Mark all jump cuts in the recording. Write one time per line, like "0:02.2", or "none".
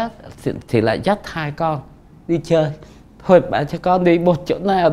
none